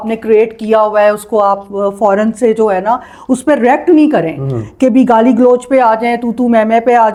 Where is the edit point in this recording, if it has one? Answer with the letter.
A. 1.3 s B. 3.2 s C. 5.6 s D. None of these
D